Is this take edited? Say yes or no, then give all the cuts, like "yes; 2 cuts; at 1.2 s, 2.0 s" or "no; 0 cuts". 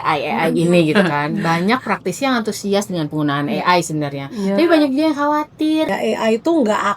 yes; 1 cut; at 5.9 s